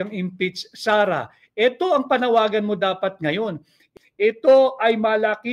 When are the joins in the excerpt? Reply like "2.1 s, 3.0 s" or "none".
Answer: 3.8 s